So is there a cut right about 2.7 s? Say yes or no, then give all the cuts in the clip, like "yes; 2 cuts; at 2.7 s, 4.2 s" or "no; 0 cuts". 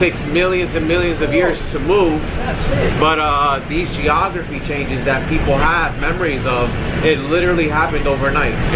no; 0 cuts